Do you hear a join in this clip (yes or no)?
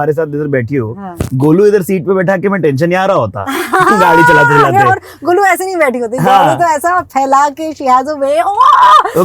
no